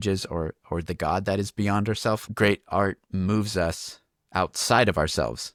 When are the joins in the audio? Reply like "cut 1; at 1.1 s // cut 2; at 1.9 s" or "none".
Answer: none